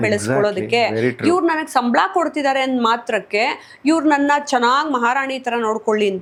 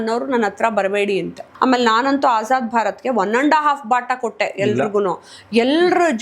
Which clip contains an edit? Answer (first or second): second